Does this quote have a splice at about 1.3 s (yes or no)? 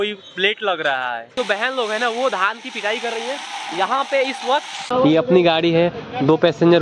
yes